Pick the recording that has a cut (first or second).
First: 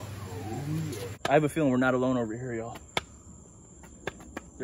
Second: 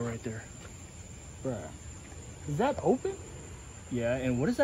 first